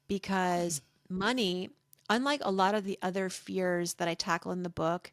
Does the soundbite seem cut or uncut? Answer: uncut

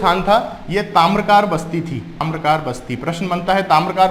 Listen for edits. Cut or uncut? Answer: cut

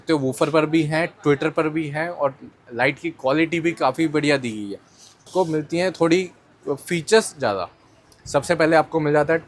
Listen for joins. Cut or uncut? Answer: cut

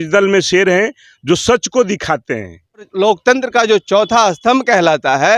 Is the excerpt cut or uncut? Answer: cut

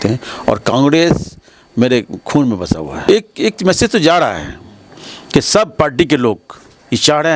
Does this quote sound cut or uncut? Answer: cut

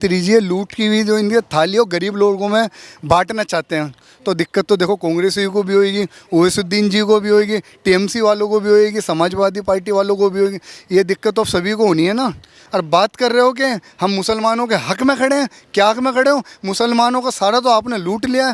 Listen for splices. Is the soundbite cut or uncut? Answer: cut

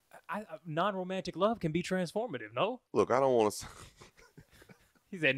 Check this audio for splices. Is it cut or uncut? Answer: cut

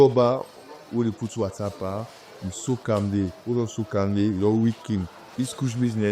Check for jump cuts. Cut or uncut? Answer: cut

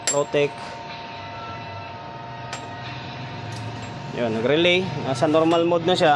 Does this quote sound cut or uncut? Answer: uncut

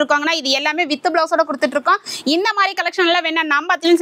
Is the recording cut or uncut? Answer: uncut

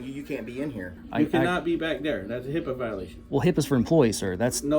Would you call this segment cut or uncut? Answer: cut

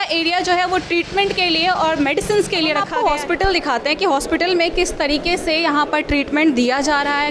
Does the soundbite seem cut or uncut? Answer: cut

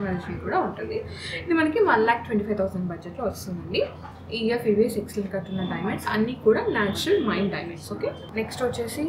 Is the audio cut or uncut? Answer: uncut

